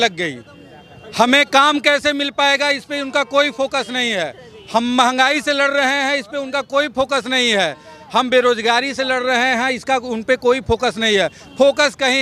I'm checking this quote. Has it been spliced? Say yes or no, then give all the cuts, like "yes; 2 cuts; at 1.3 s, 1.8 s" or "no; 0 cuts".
no; 0 cuts